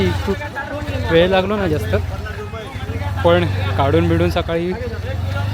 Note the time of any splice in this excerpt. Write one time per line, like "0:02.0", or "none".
none